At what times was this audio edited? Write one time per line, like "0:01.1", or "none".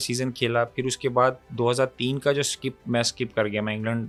none